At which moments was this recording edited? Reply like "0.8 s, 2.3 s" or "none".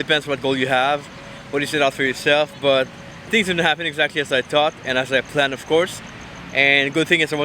3.2 s